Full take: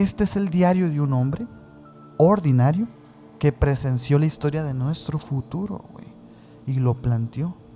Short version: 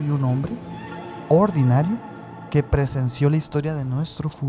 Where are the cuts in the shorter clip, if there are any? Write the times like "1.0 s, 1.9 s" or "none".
none